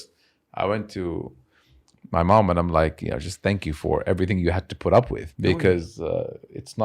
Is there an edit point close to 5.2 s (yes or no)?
yes